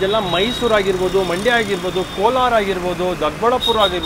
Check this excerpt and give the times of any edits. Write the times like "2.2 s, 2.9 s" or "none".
none